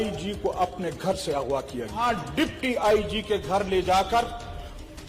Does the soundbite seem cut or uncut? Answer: cut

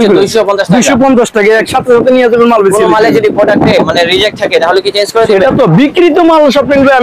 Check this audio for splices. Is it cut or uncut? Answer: cut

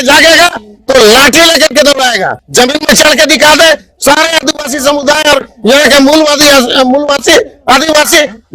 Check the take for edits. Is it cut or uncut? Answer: cut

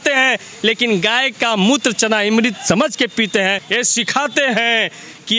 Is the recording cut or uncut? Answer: cut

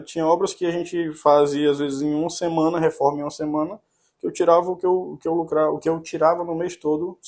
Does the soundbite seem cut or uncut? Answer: uncut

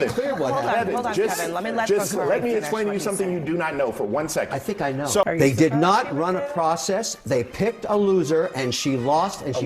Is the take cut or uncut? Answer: cut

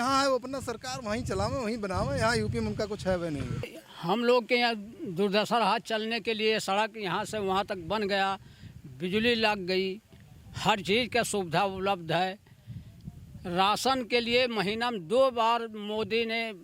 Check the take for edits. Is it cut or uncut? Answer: cut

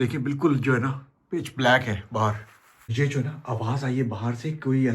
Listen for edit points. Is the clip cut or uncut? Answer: cut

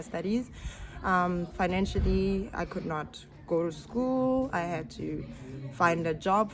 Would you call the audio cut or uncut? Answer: uncut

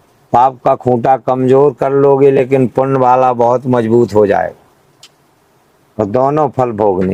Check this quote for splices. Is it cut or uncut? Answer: uncut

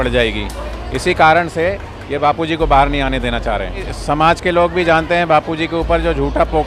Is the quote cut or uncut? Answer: cut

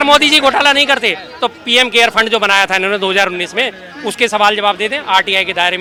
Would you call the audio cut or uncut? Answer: uncut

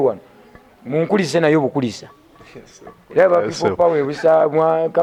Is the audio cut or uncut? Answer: uncut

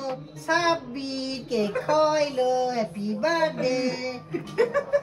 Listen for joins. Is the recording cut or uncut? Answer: uncut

